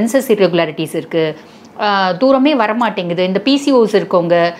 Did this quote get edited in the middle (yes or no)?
no